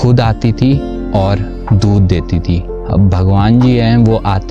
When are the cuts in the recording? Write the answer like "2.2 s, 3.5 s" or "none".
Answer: none